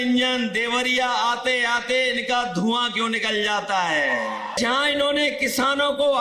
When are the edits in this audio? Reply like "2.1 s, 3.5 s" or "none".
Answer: 4.6 s